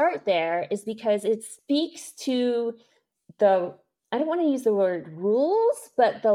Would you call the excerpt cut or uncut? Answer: uncut